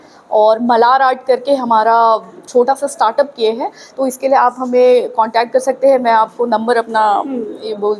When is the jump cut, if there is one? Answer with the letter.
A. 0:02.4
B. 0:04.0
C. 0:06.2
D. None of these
A